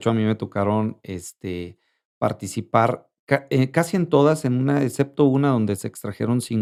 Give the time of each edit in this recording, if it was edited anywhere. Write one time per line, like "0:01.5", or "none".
none